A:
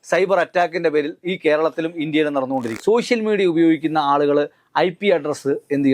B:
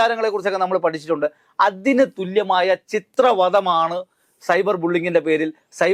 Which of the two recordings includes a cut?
A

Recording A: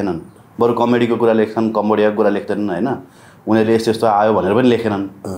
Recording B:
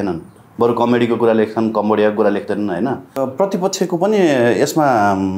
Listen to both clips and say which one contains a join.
B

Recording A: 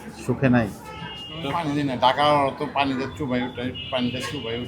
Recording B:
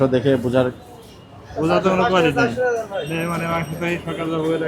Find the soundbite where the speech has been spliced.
A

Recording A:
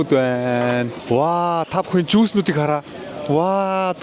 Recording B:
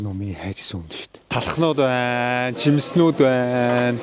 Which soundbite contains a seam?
B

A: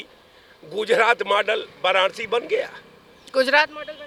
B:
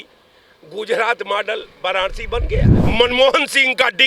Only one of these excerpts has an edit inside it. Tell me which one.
B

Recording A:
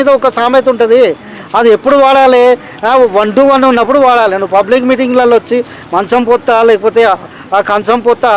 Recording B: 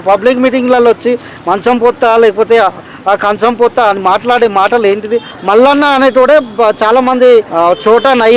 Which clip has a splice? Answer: B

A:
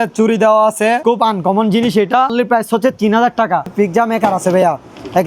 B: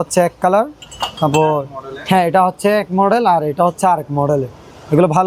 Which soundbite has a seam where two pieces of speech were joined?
A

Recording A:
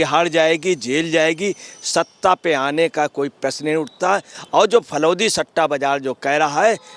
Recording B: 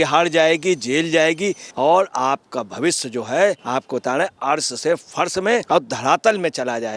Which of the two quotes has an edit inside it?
B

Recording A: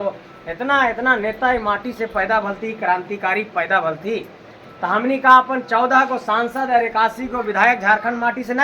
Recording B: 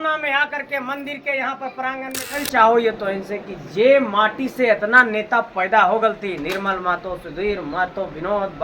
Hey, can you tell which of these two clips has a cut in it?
B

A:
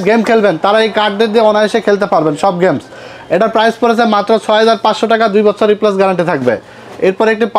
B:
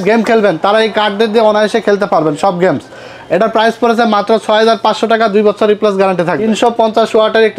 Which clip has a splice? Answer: B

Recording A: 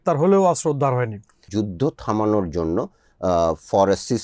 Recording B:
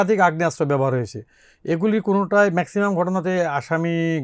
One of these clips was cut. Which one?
A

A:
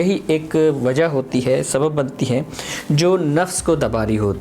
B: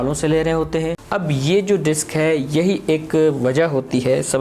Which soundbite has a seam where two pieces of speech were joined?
B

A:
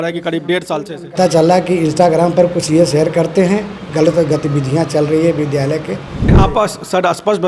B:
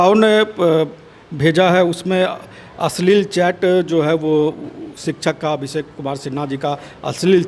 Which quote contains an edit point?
A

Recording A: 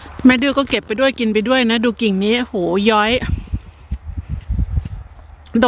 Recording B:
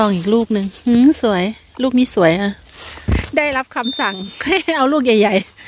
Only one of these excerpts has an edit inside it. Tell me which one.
B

